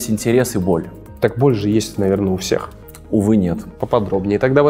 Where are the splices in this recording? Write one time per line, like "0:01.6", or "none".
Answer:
0:01.0
0:03.7